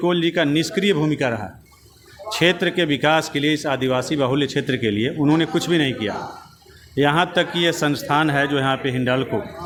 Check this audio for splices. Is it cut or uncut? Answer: uncut